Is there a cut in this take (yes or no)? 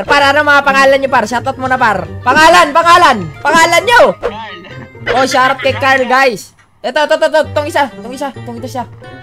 yes